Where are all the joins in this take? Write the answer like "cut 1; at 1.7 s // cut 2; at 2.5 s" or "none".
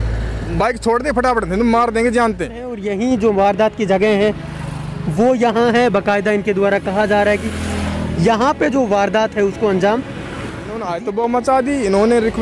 cut 1; at 2.8 s // cut 2; at 10.9 s

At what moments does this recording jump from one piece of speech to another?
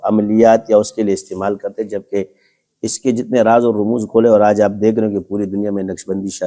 none

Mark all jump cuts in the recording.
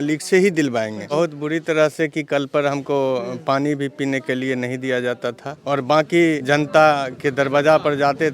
cut 1; at 1.0 s // cut 2; at 5.5 s

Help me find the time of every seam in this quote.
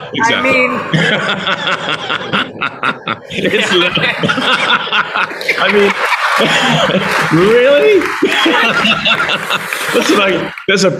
none

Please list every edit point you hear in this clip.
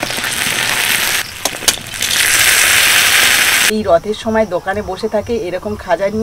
cut 1; at 1.2 s // cut 2; at 3.7 s

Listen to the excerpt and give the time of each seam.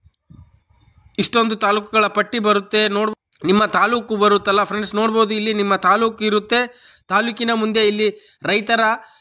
cut 1; at 3.1 s

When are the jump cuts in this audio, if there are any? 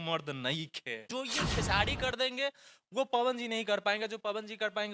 cut 1; at 1.0 s

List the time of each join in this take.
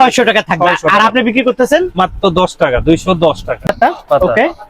cut 1; at 3.6 s

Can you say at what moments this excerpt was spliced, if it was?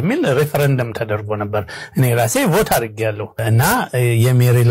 cut 1; at 3.4 s

